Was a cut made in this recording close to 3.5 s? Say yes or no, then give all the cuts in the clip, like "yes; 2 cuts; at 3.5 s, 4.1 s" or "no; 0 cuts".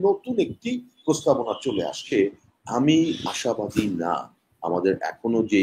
no; 1 cut; at 2.1 s